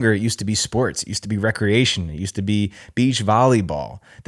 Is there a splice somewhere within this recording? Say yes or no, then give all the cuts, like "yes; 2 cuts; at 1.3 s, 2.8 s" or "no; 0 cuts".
no; 0 cuts